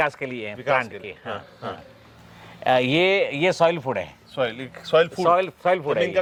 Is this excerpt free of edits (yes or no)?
yes